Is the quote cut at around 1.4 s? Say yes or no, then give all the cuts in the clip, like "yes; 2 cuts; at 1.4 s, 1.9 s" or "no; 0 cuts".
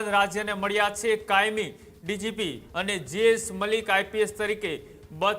no; 1 cut; at 2.6 s